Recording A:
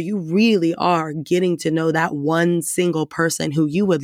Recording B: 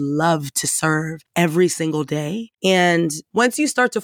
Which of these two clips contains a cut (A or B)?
B